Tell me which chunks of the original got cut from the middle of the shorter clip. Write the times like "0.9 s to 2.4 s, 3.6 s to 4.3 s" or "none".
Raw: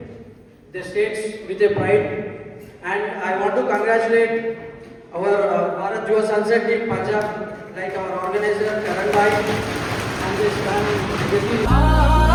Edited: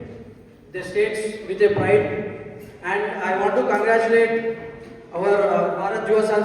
none

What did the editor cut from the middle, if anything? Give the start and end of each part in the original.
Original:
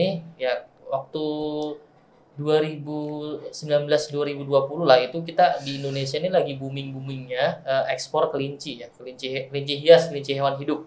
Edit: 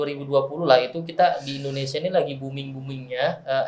none

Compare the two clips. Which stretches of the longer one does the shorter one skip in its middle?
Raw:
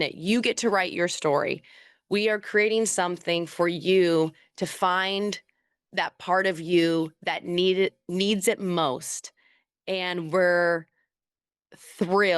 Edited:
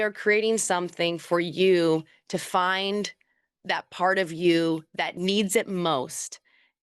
7.4 s to 8.0 s

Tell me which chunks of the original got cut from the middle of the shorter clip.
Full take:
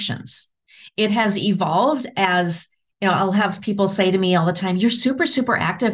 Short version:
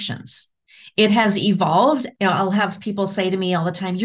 2.1 s to 2.9 s

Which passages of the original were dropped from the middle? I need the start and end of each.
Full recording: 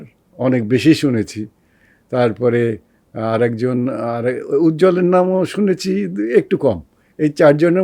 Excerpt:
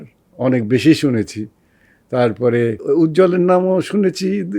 2.8 s to 4.4 s

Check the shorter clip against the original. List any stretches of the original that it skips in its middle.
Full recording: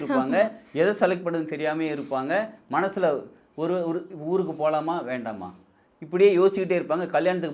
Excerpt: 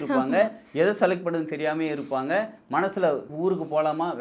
3.3 s to 4.2 s

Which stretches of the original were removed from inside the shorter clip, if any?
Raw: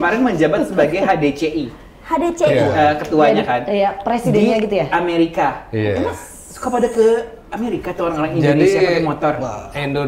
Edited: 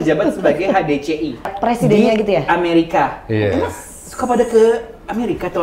1.9 s to 4.0 s

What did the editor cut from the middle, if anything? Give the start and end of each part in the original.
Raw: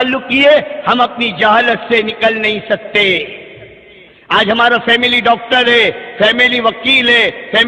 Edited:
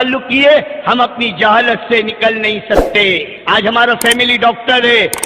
3.3 s to 4.2 s

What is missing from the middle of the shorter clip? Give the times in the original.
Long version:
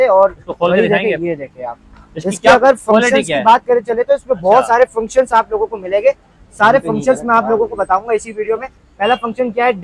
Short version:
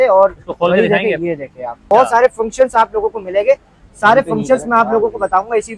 1.8 s to 4.4 s

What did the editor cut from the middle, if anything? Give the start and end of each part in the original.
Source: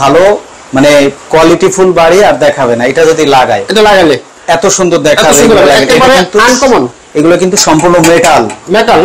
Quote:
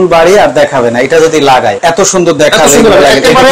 3.6 s to 4.4 s

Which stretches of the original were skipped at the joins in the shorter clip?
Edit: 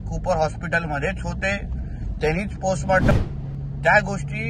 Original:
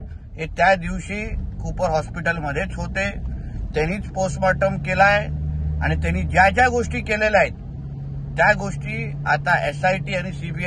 4.6 s to 7.6 s

